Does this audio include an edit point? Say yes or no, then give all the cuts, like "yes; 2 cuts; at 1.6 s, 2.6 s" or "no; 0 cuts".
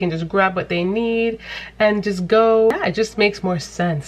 yes; 1 cut; at 2.7 s